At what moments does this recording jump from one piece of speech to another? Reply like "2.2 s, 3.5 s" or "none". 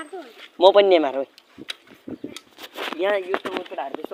none